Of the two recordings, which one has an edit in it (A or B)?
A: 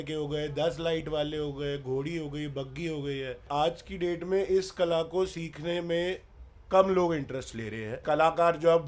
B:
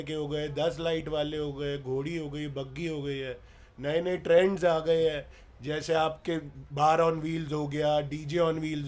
A